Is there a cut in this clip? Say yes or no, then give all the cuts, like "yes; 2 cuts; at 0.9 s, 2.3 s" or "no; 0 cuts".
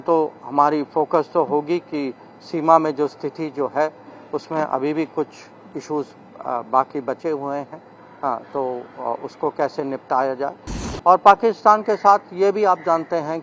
no; 0 cuts